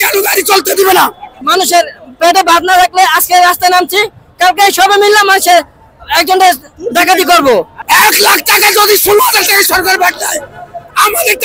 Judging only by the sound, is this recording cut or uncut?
cut